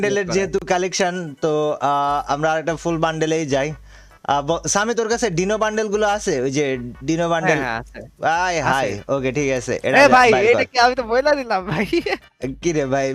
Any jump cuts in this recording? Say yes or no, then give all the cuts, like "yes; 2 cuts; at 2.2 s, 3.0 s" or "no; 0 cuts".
no; 0 cuts